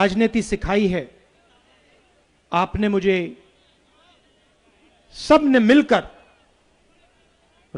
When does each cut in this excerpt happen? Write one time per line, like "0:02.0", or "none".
none